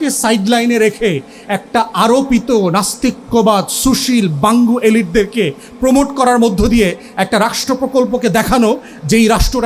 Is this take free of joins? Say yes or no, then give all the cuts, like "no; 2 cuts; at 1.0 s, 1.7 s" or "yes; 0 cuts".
yes; 0 cuts